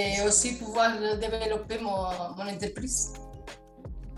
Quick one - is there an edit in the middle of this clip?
no; 0 cuts

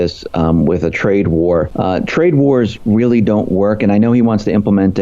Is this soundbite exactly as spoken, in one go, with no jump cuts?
no; 1 cut; at 1.7 s

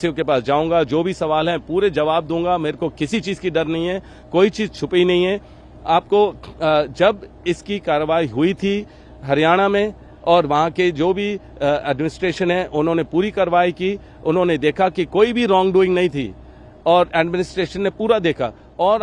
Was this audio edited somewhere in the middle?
no; 0 cuts

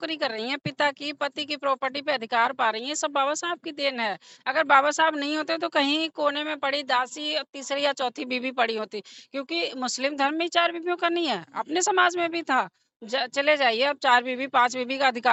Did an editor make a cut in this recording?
no; 0 cuts

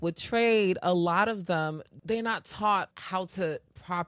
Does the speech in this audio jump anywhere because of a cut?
yes; 2 cuts; at 1.9 s, 3.0 s

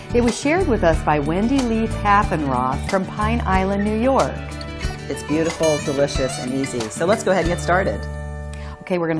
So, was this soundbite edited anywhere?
yes; 1 cut; at 8.1 s

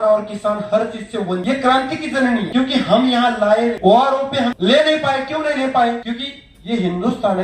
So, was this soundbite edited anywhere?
yes; 5 cuts; at 1.4 s, 2.5 s, 3.8 s, 4.6 s, 6.0 s

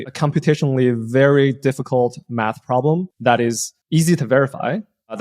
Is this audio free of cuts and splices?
no; 1 cut; at 3.3 s

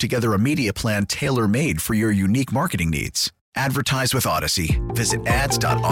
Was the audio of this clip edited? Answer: no; 0 cuts

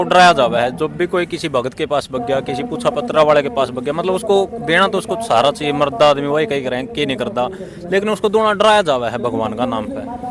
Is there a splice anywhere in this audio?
no; 0 cuts

